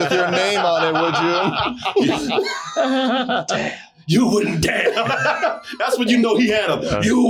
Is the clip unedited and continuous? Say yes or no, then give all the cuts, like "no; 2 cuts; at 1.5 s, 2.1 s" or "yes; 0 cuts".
yes; 0 cuts